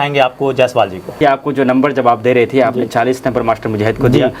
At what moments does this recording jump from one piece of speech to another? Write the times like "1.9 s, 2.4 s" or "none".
1.1 s